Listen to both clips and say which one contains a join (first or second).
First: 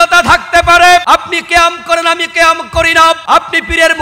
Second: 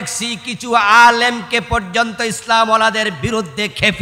first